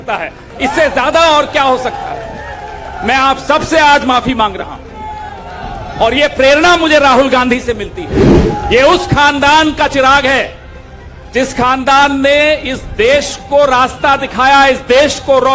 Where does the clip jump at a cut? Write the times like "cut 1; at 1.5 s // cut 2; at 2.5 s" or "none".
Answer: cut 1; at 8.3 s